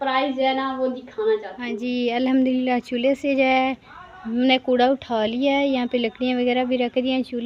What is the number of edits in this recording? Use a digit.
1